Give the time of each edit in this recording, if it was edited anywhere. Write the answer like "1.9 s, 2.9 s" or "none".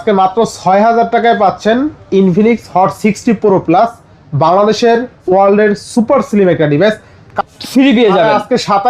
7.3 s